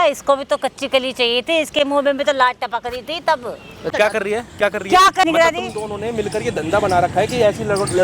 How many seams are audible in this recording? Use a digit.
2